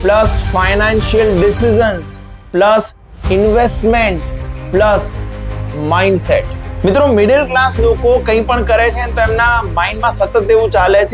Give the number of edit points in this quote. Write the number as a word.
one